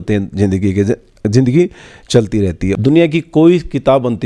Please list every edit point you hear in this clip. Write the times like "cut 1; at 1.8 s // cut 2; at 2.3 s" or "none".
cut 1; at 2.7 s